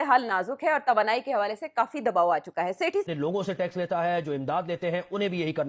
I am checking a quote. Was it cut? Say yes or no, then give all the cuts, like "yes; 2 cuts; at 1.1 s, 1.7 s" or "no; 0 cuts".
yes; 1 cut; at 3.1 s